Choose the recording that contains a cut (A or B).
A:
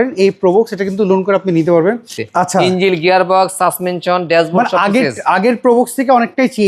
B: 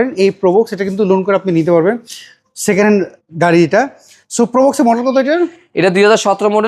A